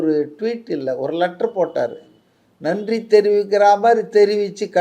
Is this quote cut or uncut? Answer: uncut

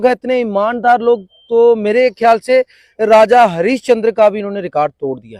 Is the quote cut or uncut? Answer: uncut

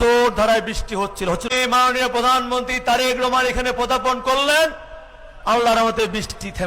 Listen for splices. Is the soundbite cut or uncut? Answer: cut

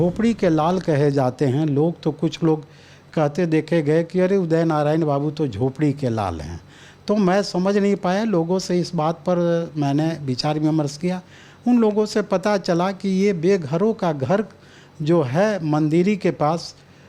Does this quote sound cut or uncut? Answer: uncut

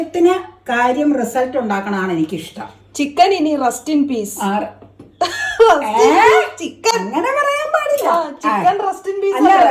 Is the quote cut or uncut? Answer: uncut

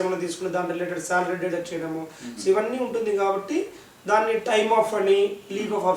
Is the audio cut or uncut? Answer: uncut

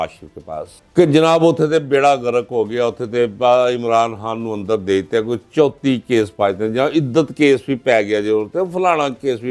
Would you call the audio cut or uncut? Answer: uncut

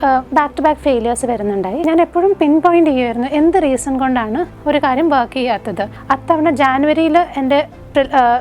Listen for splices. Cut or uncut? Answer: cut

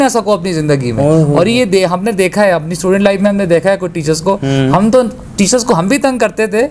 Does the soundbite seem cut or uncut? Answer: uncut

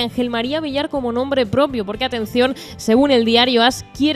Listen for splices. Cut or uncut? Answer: cut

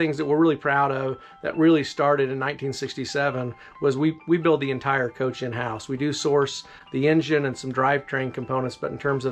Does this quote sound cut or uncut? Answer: uncut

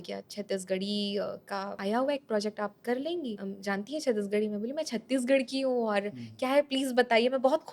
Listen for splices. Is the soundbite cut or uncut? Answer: cut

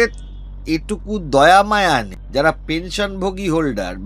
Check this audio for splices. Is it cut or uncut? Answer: cut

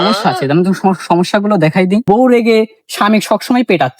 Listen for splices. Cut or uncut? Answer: cut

